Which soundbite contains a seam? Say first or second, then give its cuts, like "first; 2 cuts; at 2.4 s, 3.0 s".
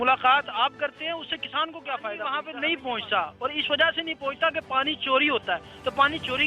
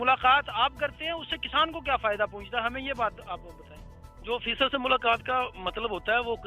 first; 1 cut; at 2.3 s